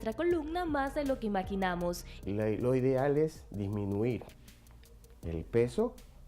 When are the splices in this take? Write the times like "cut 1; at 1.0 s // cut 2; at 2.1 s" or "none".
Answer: cut 1; at 2.1 s